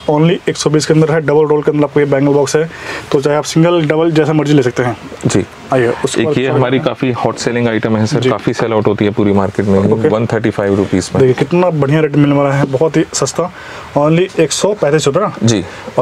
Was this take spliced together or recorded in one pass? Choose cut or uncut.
uncut